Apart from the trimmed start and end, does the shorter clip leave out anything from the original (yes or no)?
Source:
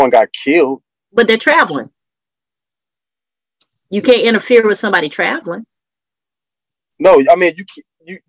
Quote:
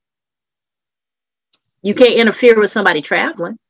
no